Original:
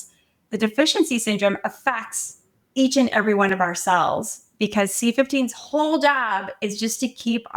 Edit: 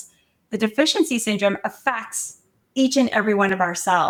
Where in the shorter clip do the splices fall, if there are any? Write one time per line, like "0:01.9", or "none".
none

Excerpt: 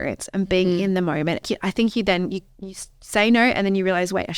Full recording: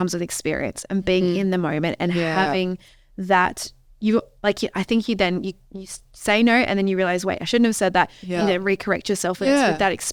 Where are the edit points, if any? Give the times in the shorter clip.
0:01.4

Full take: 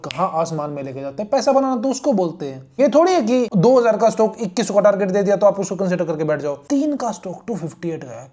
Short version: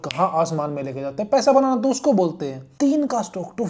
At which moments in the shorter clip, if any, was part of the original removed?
0:02.6

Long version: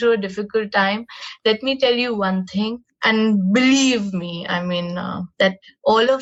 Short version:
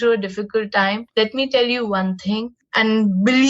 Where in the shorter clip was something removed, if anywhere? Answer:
0:01.0

